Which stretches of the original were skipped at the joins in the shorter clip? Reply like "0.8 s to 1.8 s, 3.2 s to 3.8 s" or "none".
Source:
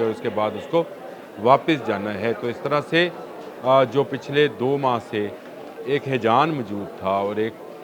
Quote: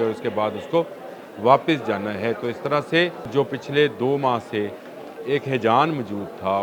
3.3 s to 3.9 s

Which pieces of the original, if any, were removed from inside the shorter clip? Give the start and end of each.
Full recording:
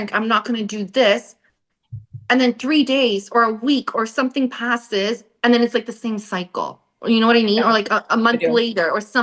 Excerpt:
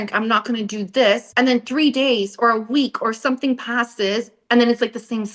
1.3 s to 2.2 s

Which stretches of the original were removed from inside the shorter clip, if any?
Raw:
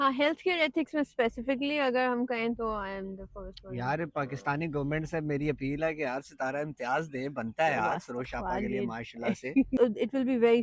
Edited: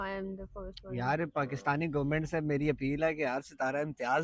none

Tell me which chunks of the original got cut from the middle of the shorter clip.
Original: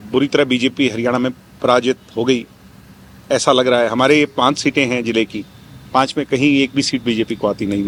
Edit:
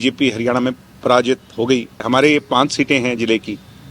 2.6 s to 3.9 s

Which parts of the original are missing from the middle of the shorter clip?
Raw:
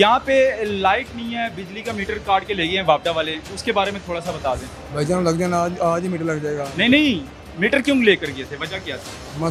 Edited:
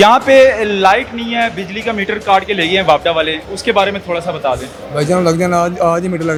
none

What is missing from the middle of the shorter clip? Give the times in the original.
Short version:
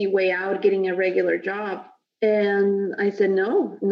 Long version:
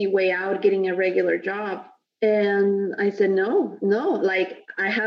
none

